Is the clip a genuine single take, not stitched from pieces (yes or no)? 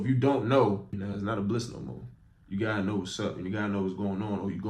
no